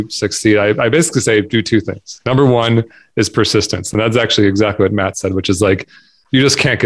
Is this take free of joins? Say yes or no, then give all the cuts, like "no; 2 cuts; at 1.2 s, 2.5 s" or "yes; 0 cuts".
yes; 0 cuts